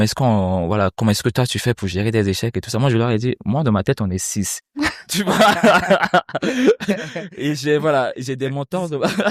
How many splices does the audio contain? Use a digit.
0